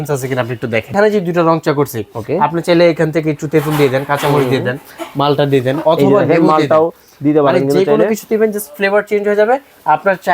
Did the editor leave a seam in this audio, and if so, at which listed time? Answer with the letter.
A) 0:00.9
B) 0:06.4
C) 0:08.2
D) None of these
A